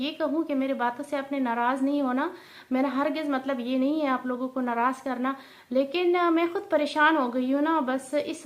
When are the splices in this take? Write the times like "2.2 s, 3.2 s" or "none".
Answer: none